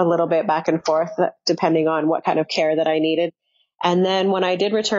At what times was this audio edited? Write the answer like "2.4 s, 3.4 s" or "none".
none